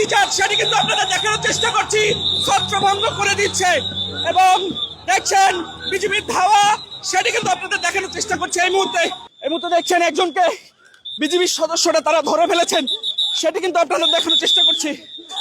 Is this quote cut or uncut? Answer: cut